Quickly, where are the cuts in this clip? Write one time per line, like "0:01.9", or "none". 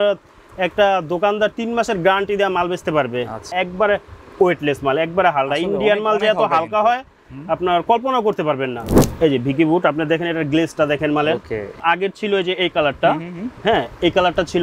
0:03.5
0:09.0
0:11.8